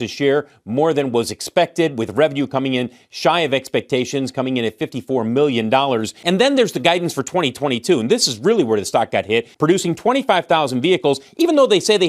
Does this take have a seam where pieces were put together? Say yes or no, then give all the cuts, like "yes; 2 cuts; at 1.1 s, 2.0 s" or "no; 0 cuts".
yes; 2 cuts; at 6.1 s, 9.5 s